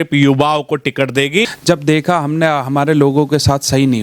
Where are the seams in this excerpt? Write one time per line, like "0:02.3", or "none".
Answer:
0:01.4